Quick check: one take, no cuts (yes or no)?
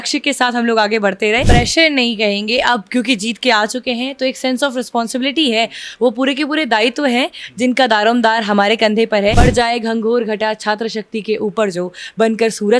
no